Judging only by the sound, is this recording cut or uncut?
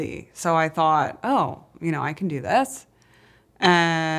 uncut